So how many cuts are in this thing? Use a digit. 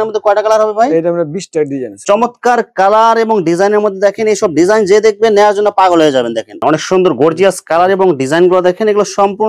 2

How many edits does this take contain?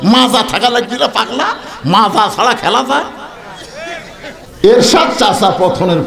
0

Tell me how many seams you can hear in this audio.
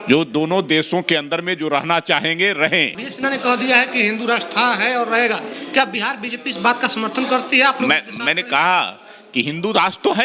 1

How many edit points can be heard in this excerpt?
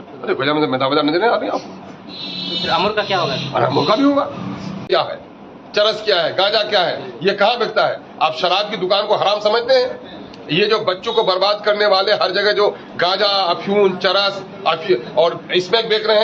1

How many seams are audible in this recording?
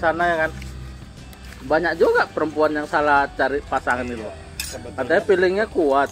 0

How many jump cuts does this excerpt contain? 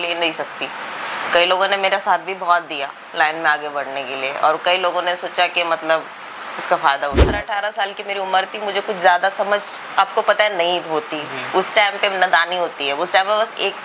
1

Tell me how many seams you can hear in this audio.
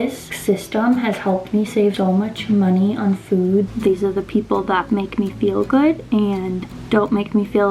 2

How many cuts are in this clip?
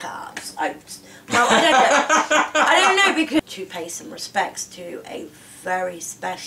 1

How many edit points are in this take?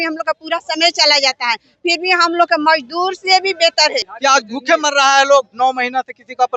1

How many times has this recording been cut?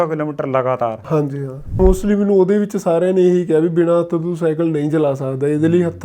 1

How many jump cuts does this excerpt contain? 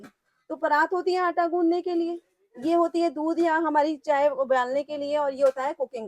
0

